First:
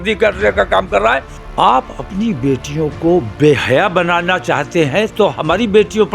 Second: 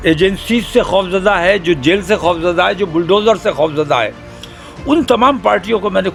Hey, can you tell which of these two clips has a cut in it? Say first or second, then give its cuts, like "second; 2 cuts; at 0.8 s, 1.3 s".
first; 1 cut; at 1.4 s